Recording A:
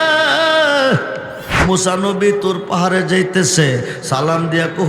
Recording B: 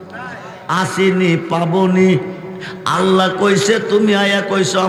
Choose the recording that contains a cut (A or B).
A